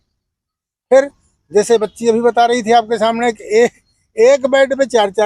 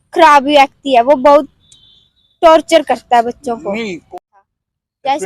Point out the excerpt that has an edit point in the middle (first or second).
second